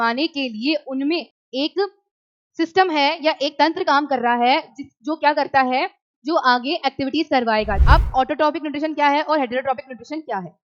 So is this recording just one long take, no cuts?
no; 2 cuts; at 1.4 s, 7.8 s

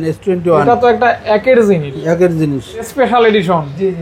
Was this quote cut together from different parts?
yes; 1 cut; at 2.9 s

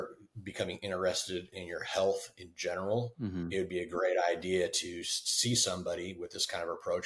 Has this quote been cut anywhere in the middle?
no; 0 cuts

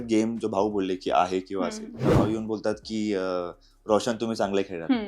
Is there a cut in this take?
yes; 1 cut; at 2.0 s

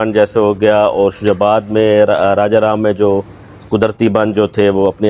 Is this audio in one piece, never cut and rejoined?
yes; 0 cuts

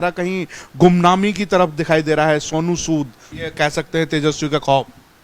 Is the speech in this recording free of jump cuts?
no; 1 cut; at 3.4 s

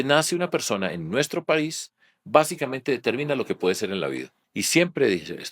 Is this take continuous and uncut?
no; 1 cut; at 4.4 s

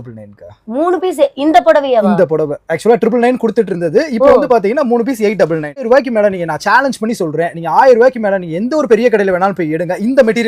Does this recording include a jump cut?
yes; 1 cut; at 5.7 s

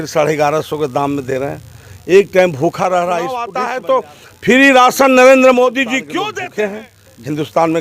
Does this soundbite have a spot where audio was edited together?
yes; 2 cuts; at 3.5 s, 6.1 s

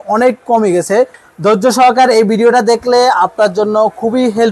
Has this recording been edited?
yes; 1 cut; at 1.2 s

